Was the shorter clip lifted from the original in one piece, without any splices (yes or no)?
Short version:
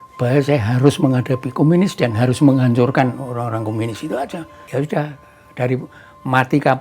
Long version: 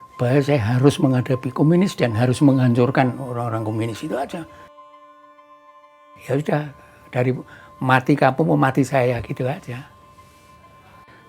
no